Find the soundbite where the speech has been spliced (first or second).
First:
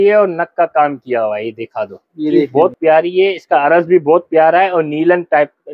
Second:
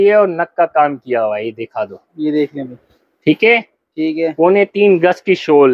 first